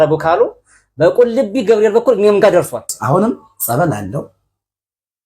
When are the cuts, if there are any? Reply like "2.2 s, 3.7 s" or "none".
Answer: 2.9 s